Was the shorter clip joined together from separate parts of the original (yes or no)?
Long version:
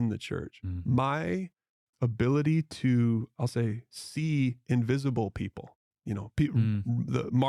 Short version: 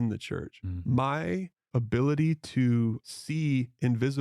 yes